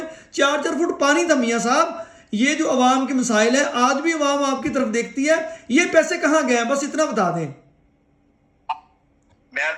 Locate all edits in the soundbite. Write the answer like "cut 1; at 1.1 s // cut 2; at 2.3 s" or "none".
none